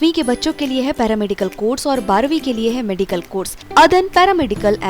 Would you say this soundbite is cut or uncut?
cut